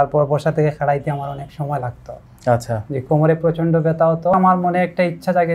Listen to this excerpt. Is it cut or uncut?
cut